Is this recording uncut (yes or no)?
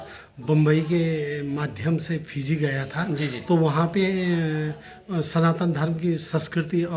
yes